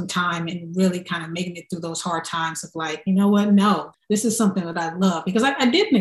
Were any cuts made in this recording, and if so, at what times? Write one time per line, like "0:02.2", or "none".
none